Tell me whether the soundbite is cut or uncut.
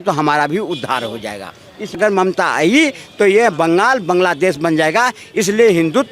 cut